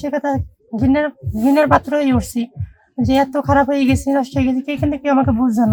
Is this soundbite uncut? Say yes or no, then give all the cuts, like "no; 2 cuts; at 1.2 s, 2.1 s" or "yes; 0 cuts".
yes; 0 cuts